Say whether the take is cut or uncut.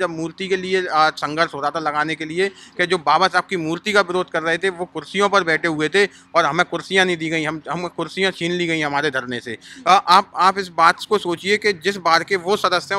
uncut